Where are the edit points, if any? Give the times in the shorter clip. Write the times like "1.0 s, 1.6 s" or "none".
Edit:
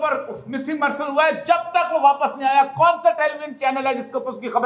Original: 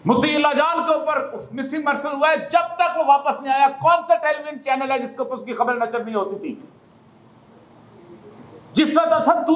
none